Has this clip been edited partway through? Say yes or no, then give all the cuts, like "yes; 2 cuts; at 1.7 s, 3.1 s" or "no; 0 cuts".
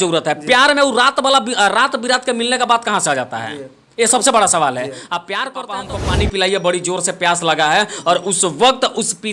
yes; 1 cut; at 5.8 s